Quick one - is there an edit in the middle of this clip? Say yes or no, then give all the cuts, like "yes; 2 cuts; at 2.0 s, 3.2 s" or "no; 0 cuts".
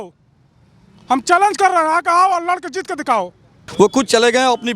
yes; 1 cut; at 3.6 s